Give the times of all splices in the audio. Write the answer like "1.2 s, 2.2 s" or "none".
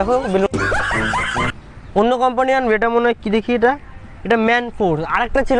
1.5 s